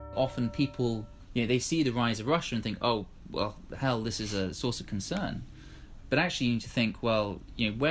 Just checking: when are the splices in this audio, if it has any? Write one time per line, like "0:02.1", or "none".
0:01.1